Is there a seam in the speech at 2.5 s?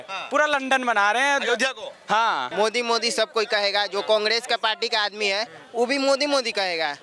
yes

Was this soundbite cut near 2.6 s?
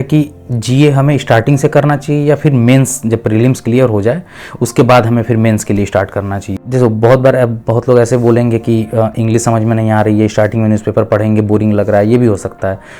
no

